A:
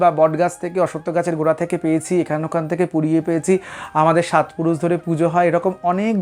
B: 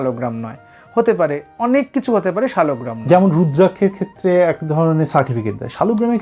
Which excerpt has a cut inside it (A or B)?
B